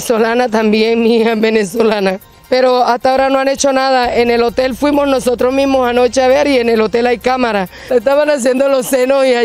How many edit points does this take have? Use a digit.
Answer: 2